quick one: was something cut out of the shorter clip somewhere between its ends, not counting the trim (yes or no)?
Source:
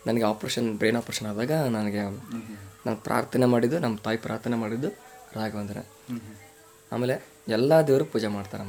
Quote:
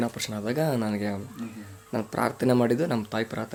no